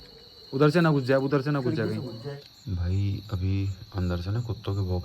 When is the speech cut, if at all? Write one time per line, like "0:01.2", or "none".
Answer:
0:02.3